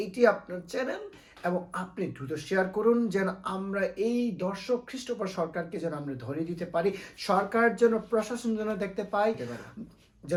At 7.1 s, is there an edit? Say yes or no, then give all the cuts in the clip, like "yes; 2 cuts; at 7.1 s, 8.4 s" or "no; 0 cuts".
no; 0 cuts